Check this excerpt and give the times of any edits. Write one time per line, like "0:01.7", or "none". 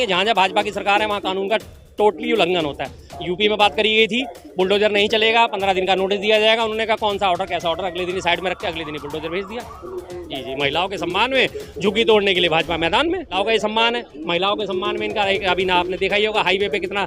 0:10.1
0:13.4